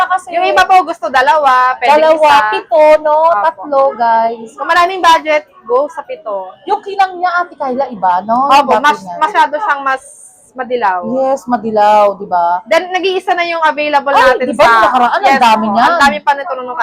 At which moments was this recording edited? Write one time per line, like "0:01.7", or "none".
none